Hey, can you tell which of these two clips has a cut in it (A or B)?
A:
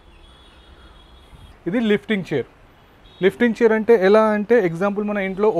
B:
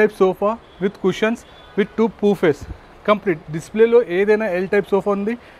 A